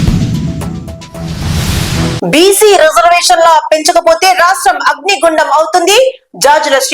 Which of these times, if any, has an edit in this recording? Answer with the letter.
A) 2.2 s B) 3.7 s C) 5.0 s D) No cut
A